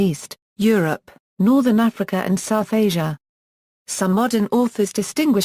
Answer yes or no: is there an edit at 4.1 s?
no